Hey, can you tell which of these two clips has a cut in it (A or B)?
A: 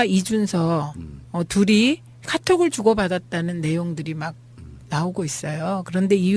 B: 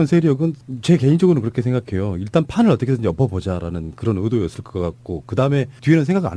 A